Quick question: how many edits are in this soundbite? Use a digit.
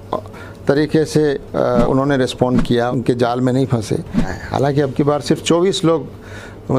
3